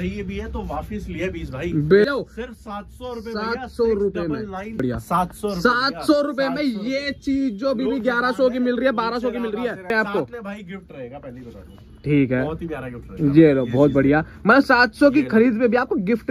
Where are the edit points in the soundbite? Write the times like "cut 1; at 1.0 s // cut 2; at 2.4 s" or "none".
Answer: cut 1; at 2.1 s // cut 2; at 4.8 s // cut 3; at 9.9 s